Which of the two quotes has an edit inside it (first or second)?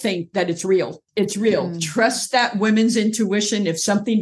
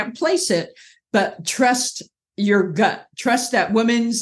first